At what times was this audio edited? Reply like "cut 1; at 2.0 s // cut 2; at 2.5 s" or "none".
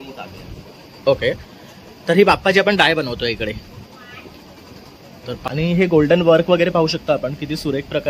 cut 1; at 5.5 s